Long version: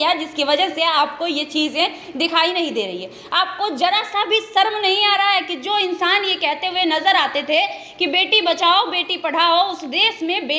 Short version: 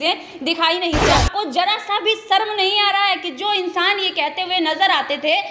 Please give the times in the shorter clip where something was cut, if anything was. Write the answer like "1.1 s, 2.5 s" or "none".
1.2 s

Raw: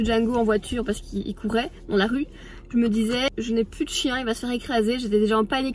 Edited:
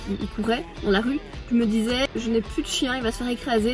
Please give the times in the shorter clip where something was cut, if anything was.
1.3 s

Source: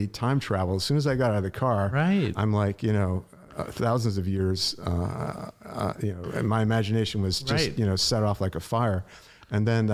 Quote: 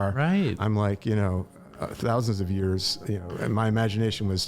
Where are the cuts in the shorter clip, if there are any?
3.0 s

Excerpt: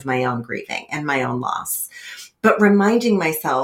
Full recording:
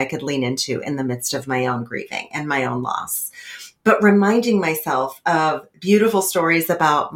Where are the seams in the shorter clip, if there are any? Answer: none

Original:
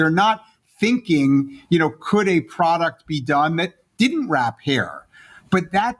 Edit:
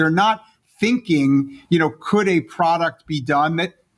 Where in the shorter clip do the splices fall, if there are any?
none

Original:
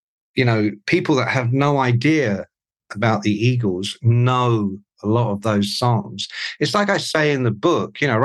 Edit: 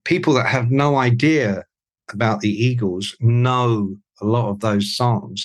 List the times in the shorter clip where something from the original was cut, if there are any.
none

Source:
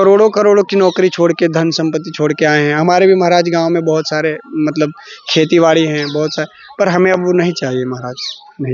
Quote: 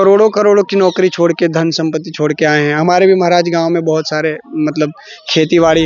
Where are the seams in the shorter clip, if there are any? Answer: none

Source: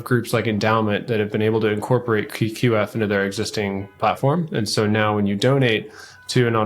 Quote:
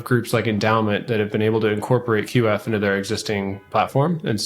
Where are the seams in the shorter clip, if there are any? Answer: 2.3 s

